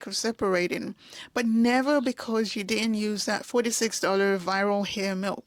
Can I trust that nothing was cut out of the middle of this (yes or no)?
yes